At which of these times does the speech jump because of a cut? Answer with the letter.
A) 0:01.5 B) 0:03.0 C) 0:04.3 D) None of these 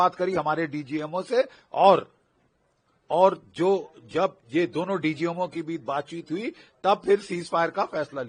D